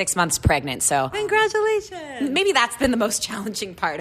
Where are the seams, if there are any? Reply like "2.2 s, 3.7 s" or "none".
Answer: 1.1 s, 2.8 s